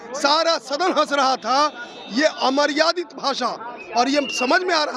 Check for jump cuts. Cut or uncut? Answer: uncut